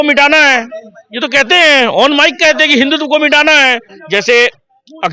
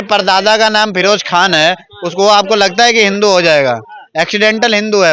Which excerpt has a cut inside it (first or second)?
first